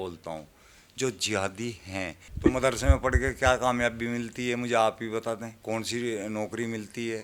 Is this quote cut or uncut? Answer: cut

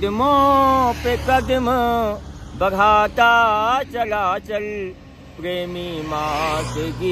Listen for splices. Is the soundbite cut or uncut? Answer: uncut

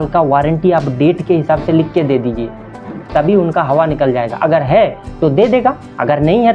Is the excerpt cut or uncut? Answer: uncut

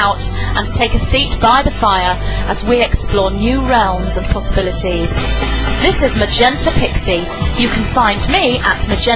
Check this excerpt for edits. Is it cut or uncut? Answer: cut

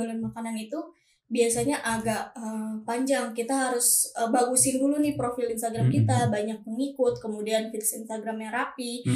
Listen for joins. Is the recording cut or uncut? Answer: uncut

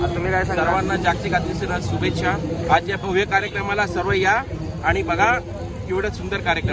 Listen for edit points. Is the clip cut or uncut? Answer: uncut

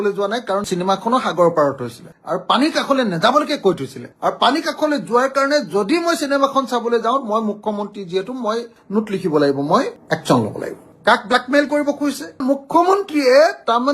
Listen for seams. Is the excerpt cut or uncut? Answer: cut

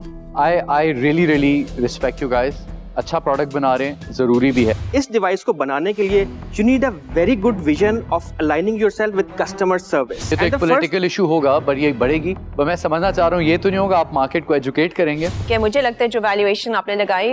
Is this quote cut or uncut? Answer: cut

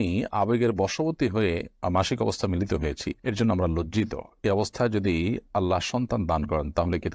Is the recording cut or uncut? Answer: uncut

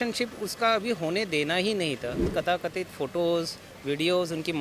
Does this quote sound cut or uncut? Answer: cut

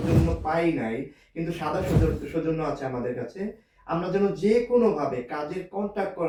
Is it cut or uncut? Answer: uncut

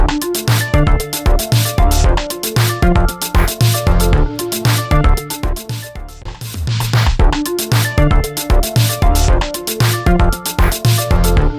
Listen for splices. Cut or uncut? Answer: cut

